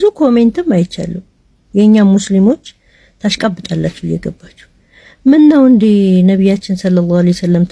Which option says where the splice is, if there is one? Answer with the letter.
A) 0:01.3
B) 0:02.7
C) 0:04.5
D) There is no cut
D